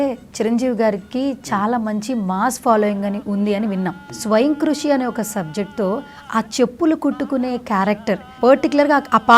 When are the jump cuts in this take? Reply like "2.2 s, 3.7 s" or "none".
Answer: 4.1 s, 8.3 s